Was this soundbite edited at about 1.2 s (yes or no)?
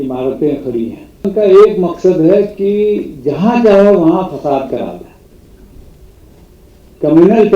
yes